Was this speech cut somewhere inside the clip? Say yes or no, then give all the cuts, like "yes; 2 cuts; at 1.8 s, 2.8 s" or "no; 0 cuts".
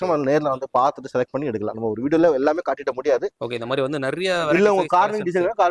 yes; 1 cut; at 3.4 s